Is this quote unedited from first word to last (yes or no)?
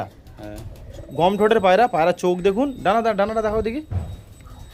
yes